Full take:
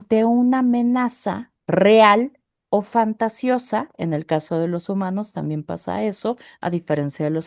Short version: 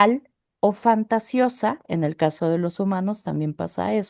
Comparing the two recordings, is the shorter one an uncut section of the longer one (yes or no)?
yes